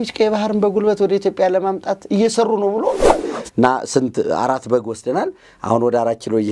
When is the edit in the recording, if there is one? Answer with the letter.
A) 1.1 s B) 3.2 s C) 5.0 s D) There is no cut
B